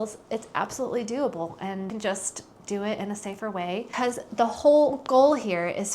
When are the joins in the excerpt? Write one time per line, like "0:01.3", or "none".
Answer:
0:03.9